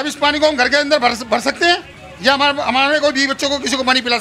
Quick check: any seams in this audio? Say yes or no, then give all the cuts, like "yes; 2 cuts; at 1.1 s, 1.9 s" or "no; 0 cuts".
no; 0 cuts